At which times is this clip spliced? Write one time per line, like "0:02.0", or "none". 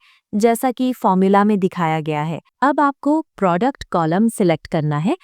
0:02.5